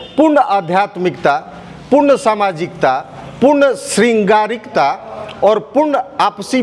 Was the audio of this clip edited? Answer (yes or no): no